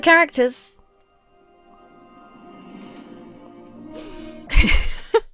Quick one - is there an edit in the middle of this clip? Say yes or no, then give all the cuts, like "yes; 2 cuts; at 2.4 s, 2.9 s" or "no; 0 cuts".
no; 0 cuts